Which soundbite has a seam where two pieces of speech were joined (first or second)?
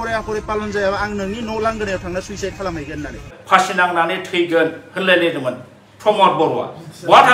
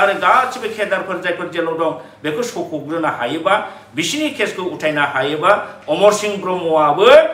first